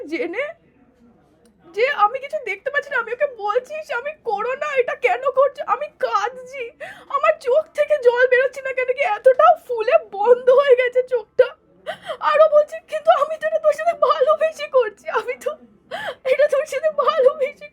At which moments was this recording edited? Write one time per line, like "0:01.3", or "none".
none